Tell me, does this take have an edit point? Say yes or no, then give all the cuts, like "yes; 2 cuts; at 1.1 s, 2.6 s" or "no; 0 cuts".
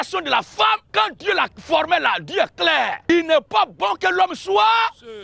yes; 2 cuts; at 0.9 s, 3.0 s